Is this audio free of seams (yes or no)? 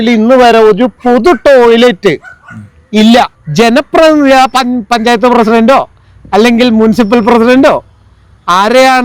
no